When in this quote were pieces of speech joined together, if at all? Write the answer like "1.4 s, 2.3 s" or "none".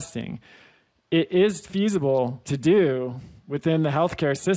2.4 s